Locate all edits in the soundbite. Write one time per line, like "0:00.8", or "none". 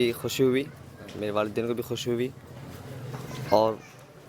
none